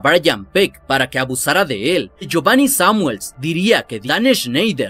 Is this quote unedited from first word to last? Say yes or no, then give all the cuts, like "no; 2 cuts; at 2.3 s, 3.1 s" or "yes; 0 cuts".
no; 2 cuts; at 2.3 s, 3.9 s